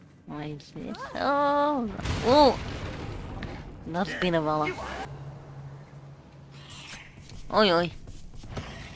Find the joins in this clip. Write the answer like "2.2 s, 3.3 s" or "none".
5.1 s